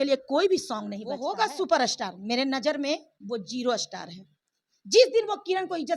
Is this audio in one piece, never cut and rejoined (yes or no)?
no